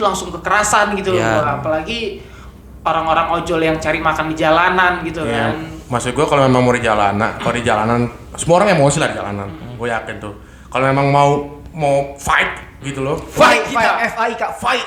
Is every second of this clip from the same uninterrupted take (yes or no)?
yes